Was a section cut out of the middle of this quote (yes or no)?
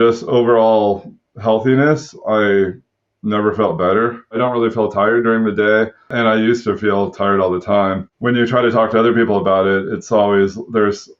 yes